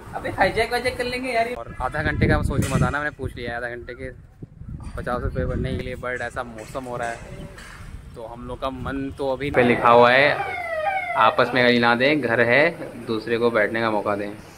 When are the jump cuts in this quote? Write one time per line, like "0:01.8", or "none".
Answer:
0:01.6
0:05.8
0:09.5